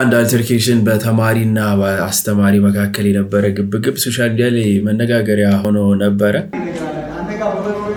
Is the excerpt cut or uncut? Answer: uncut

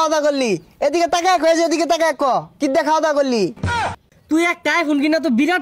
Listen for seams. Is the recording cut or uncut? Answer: cut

